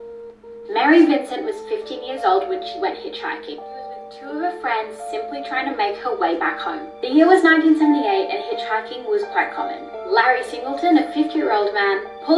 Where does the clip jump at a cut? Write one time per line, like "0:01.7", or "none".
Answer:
none